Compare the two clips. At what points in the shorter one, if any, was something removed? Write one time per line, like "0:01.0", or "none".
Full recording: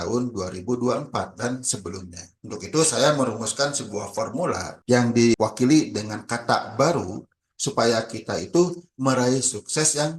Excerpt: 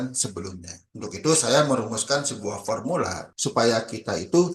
0:03.2